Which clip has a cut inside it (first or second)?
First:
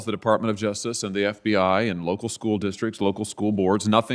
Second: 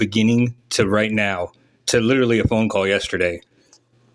first